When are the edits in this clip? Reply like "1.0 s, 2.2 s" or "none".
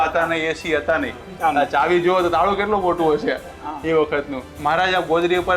1.3 s, 4.5 s